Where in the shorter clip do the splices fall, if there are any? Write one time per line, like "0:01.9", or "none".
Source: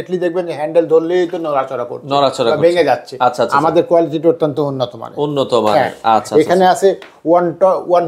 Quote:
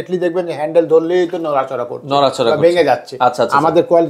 none